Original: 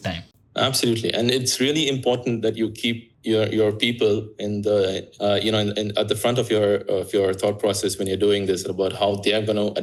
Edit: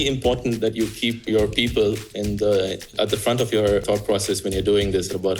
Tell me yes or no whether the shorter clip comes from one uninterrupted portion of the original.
no